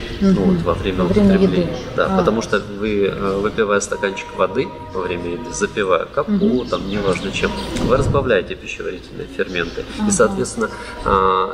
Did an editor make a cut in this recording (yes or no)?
no